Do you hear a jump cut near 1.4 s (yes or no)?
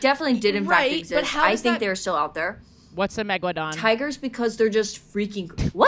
no